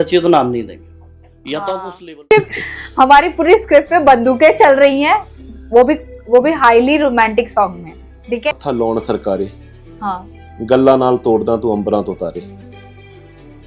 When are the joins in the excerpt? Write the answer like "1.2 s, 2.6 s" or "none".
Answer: 2.2 s, 8.5 s